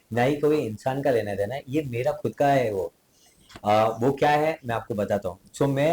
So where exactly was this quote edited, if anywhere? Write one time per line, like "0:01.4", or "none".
none